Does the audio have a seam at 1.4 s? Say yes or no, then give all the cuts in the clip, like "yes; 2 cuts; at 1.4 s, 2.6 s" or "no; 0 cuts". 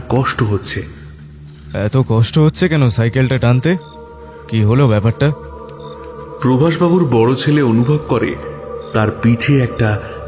no; 0 cuts